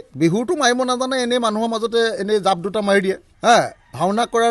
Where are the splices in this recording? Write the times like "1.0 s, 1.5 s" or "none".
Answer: 3.3 s

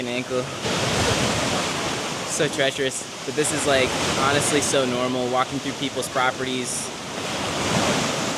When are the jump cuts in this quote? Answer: none

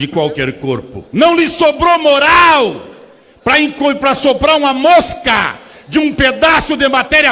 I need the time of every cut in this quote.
1.0 s

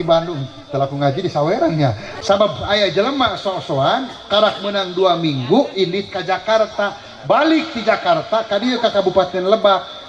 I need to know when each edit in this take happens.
2.1 s

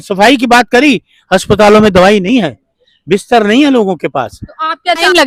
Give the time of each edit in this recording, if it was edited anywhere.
none

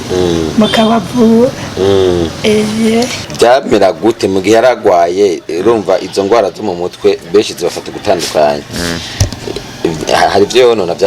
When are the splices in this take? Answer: 3.2 s

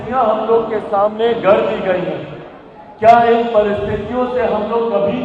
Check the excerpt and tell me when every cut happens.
none

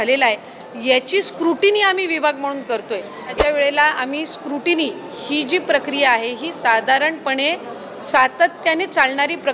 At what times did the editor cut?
3.3 s

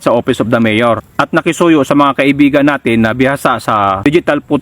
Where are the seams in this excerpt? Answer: 1.1 s

